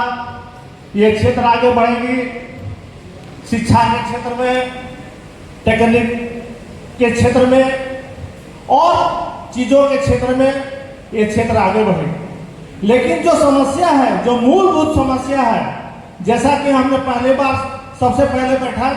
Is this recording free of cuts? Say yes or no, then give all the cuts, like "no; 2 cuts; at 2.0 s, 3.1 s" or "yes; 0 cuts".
yes; 0 cuts